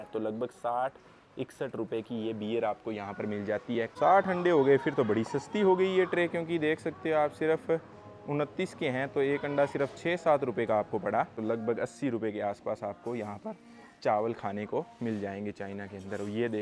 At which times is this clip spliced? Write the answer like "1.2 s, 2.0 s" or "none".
3.9 s, 11.3 s